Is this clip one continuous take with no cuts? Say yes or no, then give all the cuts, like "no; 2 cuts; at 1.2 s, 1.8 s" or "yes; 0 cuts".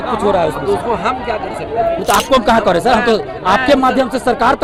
yes; 0 cuts